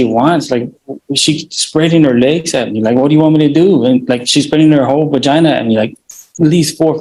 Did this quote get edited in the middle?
no; 0 cuts

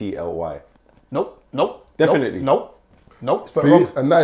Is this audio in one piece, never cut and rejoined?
yes; 0 cuts

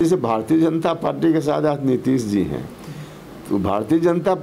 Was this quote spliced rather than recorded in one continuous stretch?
no; 0 cuts

